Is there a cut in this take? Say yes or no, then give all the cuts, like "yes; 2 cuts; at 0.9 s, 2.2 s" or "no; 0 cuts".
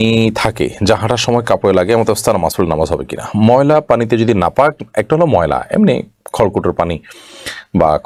no; 0 cuts